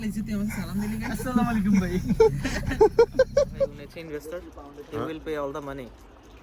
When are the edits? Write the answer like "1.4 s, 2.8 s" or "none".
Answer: 3.9 s